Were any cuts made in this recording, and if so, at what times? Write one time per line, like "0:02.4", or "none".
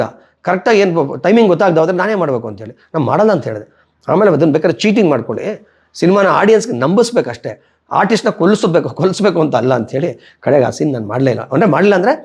none

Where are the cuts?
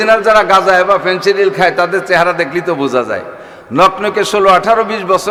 none

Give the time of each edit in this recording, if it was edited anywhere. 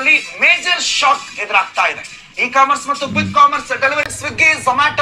0:04.1

